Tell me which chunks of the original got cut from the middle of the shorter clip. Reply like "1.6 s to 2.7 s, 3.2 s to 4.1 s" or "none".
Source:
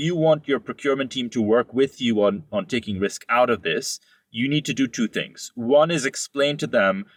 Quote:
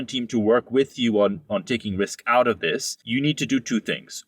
4.0 s to 4.2 s

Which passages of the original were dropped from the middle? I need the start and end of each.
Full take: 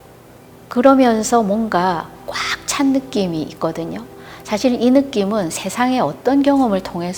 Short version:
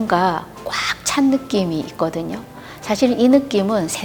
none

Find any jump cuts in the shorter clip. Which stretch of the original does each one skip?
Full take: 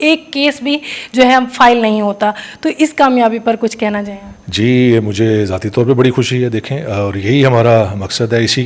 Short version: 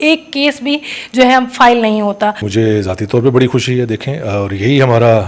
2.5 s to 5.1 s

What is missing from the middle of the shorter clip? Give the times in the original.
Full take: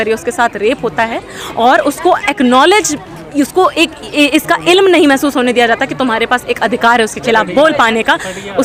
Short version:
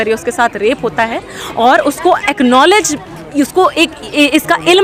none

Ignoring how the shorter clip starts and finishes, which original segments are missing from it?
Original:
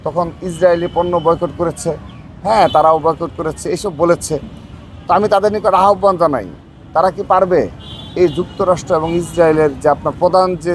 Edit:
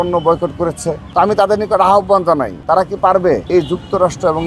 1.9 s to 4.9 s, 6.5 s to 6.8 s, 7.7 s to 8.1 s

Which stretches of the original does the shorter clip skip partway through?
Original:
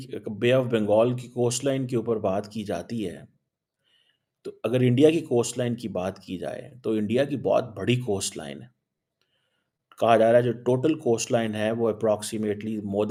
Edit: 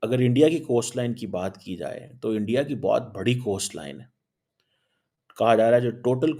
none

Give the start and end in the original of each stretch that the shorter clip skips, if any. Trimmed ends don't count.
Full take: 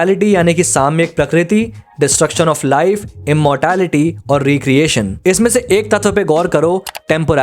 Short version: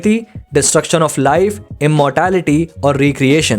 none

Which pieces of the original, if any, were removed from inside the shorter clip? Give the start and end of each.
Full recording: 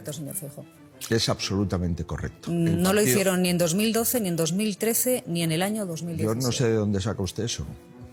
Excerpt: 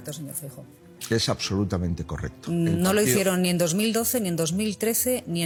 none

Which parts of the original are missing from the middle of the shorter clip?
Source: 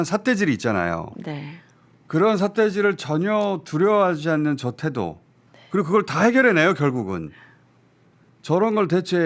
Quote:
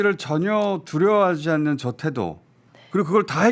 none

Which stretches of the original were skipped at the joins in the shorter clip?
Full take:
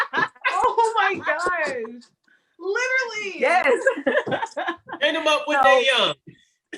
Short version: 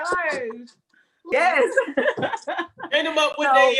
2.6 s to 3.4 s

